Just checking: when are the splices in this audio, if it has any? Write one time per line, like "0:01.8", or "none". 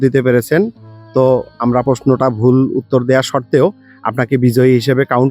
0:01.8

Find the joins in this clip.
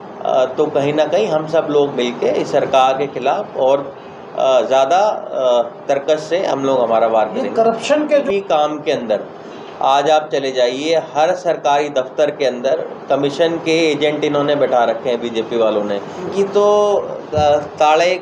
0:07.9
0:16.3

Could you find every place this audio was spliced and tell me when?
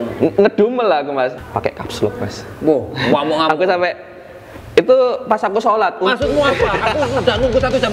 0:01.4

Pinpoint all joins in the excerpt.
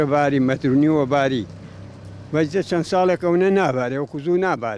none

